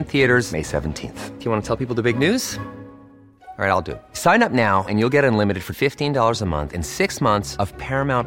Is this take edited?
no; 0 cuts

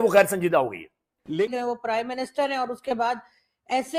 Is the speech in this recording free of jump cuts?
yes; 0 cuts

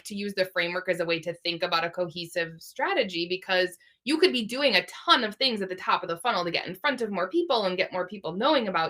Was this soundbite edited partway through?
no; 0 cuts

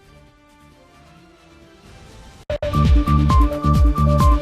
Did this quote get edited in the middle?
yes; 1 cut; at 2.6 s

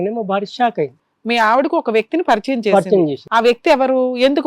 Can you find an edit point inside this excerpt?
yes; 1 cut; at 1.0 s

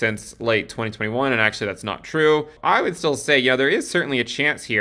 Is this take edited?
yes; 1 cut; at 2.5 s

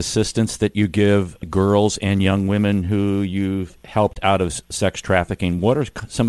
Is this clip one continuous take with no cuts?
no; 1 cut; at 1.4 s

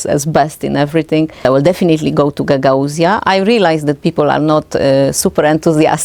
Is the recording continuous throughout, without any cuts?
no; 1 cut; at 1.4 s

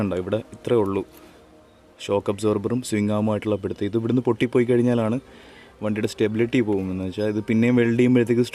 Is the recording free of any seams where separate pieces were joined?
yes; 0 cuts

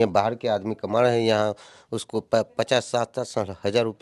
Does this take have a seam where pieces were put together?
no; 0 cuts

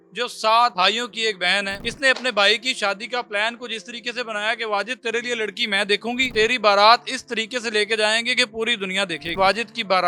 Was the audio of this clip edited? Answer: yes; 4 cuts; at 0.7 s, 1.8 s, 6.2 s, 9.3 s

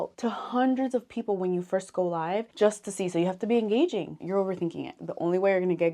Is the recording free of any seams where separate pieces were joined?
no; 1 cut; at 4.2 s

